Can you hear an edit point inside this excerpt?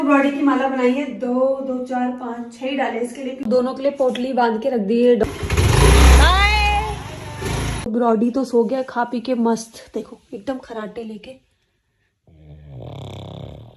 yes; 3 cuts; at 3.4 s, 5.2 s, 7.9 s

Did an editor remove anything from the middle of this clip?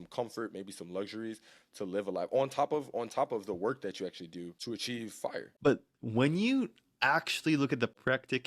yes; 1 cut; at 5.5 s

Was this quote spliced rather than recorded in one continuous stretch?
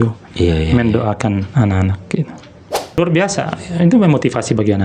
yes; 1 cut; at 3.0 s

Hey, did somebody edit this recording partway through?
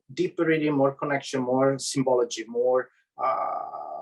no; 0 cuts

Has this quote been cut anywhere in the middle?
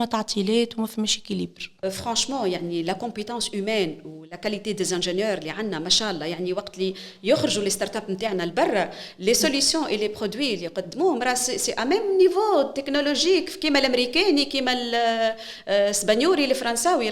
yes; 1 cut; at 1.8 s

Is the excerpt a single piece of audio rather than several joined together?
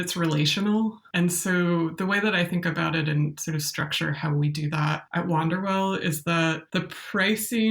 no; 3 cuts; at 1.0 s, 5.0 s, 6.6 s

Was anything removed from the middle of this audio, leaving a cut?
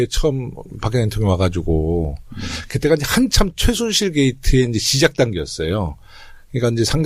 yes; 1 cut; at 4.2 s

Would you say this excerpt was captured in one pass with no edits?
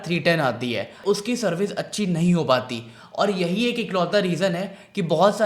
no; 1 cut; at 1.0 s

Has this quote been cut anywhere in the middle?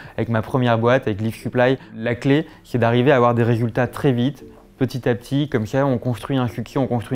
yes; 1 cut; at 2.0 s

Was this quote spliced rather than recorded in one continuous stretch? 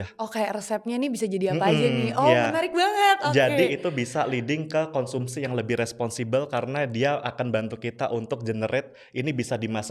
no; 0 cuts

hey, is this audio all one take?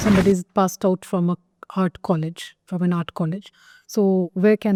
yes; 0 cuts

